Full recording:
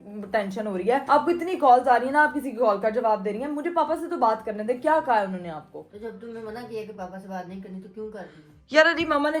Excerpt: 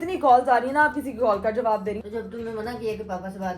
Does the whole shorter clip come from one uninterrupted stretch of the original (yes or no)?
no